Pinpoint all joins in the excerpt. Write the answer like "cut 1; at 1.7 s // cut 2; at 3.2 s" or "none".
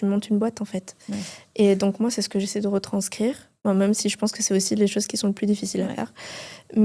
none